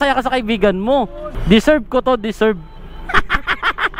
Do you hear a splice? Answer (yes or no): yes